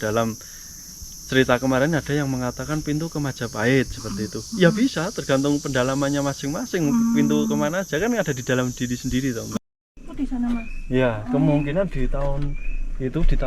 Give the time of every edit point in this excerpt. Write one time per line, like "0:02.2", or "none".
0:09.5